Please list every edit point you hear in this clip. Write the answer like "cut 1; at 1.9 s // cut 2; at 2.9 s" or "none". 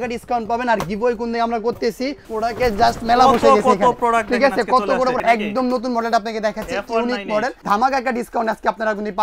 cut 1; at 2.2 s // cut 2; at 5.2 s // cut 3; at 7.6 s